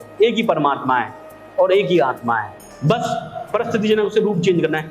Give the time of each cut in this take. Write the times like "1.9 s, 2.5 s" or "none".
2.6 s